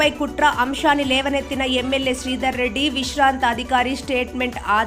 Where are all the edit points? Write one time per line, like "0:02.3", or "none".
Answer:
none